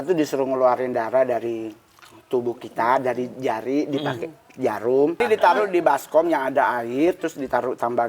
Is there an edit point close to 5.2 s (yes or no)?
yes